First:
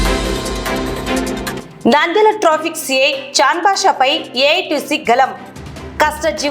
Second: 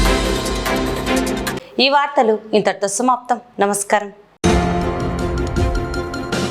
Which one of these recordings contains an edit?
first; 1 cut; at 1.5 s

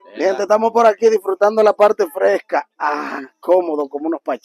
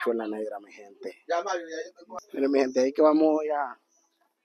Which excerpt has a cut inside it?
second; 1 cut; at 2.0 s

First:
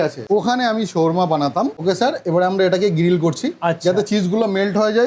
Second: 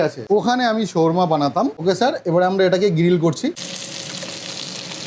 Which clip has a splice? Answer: second; 1 cut; at 3.6 s

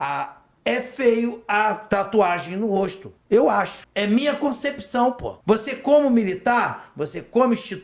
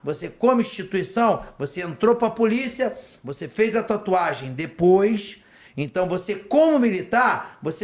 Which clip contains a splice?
first; 4 cuts; at 1.8 s, 3.1 s, 3.8 s, 5.3 s

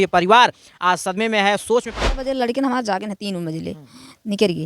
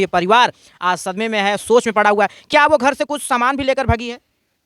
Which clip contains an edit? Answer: first; 1 cut; at 2.0 s

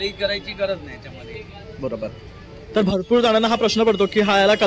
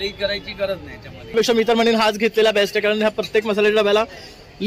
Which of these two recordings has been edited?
second; 1 cut; at 1.3 s

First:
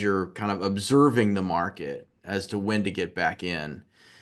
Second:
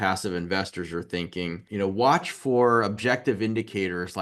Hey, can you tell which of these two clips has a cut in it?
second; 1 cut; at 1.6 s

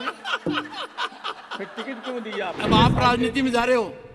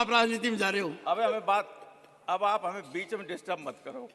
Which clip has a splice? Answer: first; 1 cut; at 2.6 s

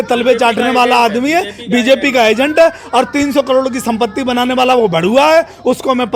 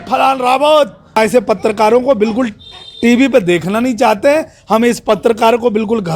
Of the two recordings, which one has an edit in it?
second; 1 cut; at 1.2 s

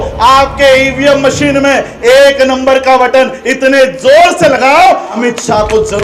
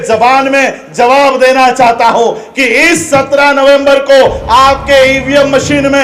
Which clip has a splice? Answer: first; 1 cut; at 5.1 s

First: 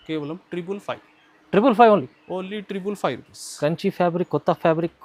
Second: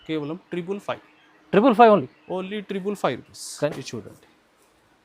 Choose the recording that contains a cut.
second; 1 cut; at 3.7 s

